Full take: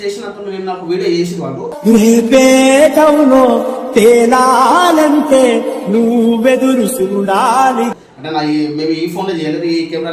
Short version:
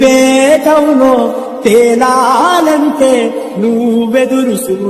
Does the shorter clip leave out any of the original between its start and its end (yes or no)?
no